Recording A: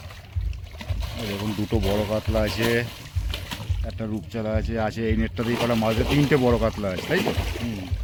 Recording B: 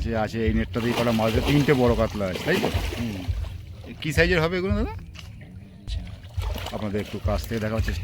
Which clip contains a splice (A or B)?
B